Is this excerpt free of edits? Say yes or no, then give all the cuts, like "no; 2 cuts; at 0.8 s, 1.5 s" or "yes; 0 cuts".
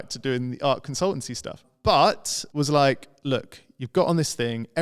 no; 2 cuts; at 1.7 s, 2.4 s